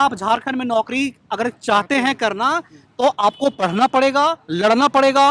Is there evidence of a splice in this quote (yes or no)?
no